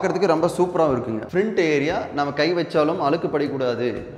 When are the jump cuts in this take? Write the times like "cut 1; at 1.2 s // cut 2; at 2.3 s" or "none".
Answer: cut 1; at 1.2 s